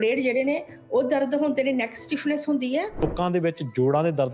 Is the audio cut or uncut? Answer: cut